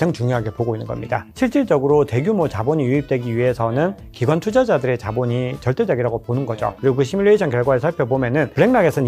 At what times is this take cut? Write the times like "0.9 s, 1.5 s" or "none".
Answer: 1.3 s, 6.8 s